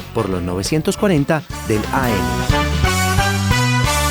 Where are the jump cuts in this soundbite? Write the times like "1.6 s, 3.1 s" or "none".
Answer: 2.2 s